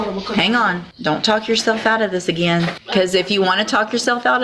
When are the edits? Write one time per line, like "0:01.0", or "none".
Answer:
0:00.9
0:02.8